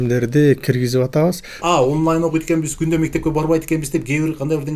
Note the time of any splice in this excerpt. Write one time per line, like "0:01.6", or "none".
0:01.5